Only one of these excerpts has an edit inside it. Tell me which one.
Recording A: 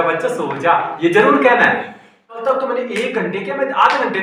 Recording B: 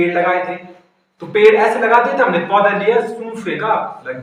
A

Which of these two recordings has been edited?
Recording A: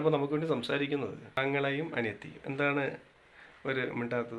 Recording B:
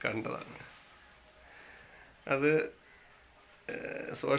A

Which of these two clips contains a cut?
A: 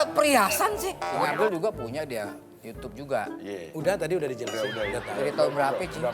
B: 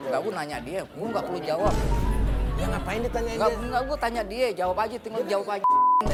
A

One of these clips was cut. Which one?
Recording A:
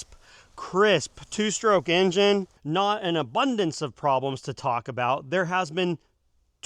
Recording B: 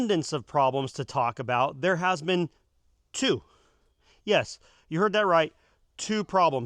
A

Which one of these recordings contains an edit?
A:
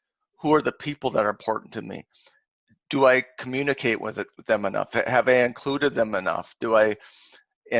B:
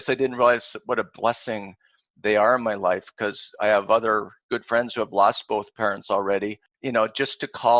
B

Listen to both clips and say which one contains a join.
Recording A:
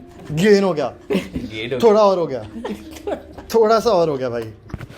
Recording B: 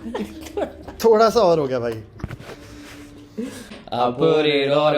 B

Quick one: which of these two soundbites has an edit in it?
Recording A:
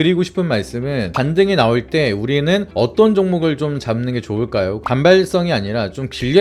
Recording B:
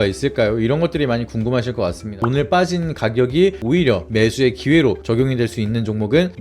B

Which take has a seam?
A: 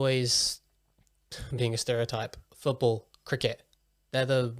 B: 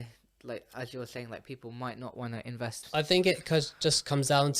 B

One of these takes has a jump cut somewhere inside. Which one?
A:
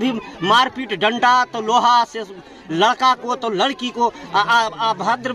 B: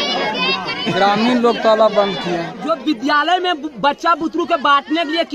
B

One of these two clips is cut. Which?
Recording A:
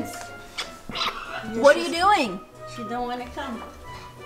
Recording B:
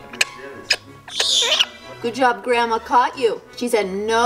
B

